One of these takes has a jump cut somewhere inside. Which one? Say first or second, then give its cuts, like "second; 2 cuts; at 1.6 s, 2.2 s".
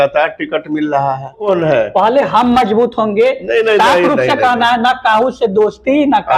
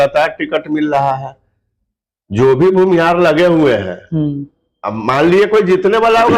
first; 1 cut; at 1.4 s